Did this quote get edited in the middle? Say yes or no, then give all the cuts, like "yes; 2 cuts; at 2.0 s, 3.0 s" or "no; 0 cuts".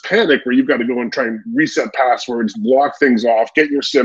no; 0 cuts